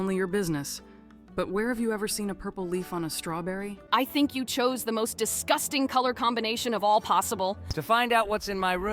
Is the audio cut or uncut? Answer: cut